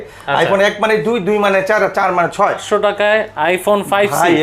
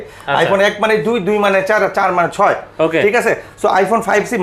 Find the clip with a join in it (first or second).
first